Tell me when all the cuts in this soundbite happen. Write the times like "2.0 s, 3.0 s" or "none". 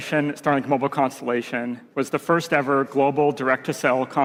none